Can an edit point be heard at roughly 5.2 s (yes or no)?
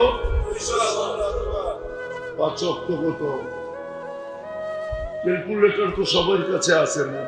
yes